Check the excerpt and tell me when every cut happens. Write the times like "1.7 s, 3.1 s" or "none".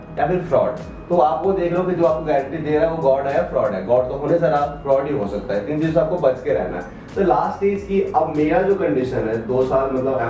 none